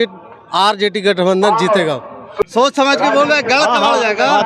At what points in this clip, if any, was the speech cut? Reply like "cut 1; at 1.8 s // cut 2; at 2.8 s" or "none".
cut 1; at 2.4 s